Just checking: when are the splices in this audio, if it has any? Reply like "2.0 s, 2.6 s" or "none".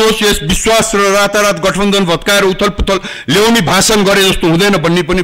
none